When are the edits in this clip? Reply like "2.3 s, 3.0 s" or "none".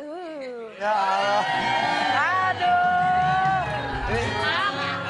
2.1 s